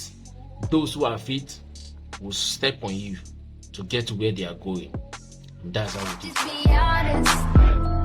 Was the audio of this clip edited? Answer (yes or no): yes